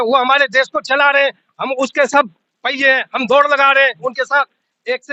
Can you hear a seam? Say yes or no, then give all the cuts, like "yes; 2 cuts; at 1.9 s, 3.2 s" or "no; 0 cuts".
no; 0 cuts